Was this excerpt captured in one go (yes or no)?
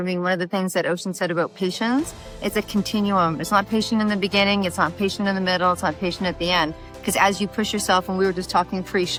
yes